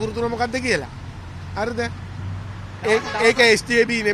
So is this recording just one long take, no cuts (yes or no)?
yes